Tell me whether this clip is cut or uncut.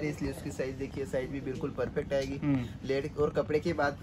uncut